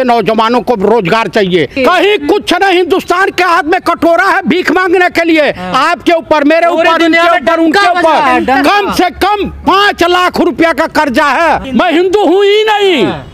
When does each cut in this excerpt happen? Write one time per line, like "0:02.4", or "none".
0:01.7
0:11.6